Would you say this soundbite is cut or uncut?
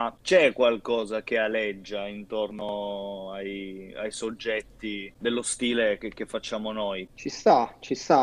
cut